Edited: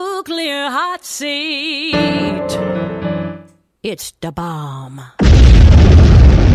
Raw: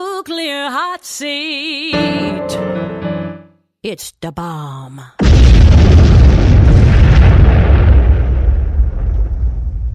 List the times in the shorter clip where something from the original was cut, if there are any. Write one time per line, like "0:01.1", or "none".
none